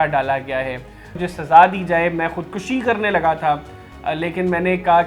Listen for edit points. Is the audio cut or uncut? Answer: cut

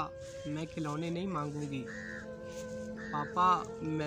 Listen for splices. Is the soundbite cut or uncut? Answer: uncut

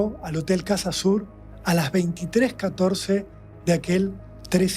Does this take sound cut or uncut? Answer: uncut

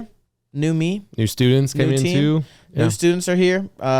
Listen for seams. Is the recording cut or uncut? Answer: uncut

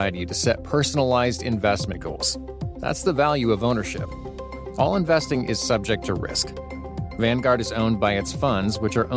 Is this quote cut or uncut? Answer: uncut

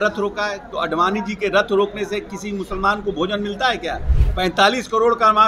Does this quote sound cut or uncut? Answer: cut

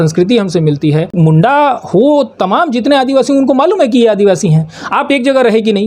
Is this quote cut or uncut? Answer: cut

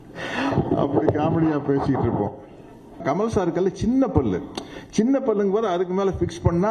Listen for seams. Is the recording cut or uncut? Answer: cut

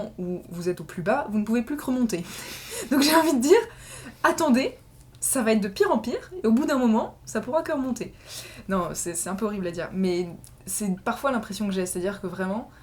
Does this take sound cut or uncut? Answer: uncut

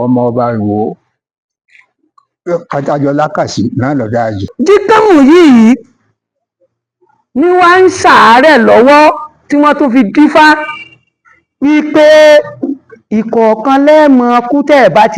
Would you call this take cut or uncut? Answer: cut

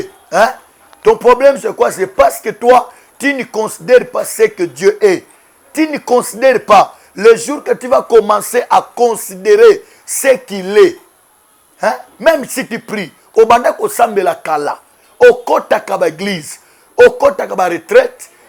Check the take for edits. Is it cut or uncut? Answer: uncut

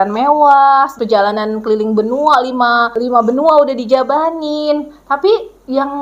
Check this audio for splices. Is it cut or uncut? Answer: cut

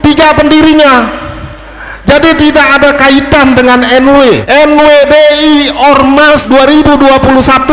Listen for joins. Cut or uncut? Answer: cut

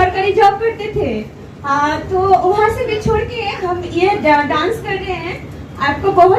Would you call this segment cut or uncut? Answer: uncut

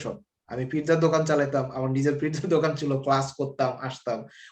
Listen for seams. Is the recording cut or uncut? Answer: uncut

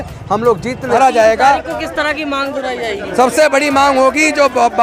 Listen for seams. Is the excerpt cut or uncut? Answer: cut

